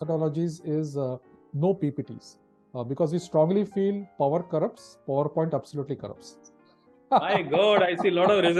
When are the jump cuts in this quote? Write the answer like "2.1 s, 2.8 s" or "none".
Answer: none